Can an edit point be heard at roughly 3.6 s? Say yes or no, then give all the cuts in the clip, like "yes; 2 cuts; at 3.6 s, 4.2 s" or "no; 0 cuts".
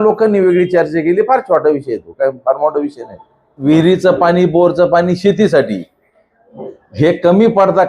yes; 1 cut; at 3.6 s